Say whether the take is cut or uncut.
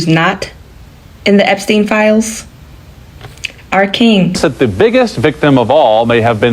cut